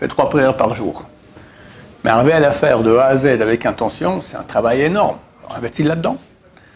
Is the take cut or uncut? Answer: uncut